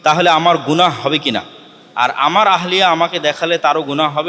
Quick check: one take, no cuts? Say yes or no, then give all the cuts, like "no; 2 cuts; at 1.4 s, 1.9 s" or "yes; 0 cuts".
yes; 0 cuts